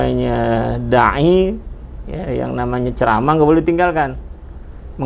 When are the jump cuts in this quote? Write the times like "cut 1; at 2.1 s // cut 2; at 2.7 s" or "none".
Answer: none

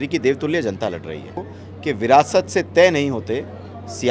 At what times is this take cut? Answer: cut 1; at 1.5 s

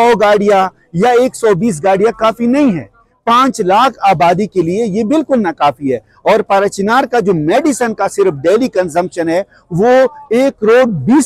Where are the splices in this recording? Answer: none

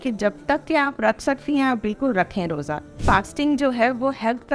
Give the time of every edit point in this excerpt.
cut 1; at 2.9 s

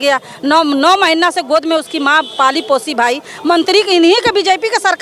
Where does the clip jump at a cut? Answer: none

